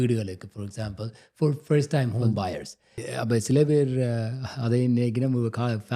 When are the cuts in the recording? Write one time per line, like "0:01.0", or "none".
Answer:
0:03.0